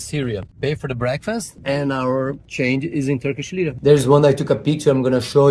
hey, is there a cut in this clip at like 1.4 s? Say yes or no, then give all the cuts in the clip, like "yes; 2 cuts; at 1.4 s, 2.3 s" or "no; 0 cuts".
no; 1 cut; at 3.7 s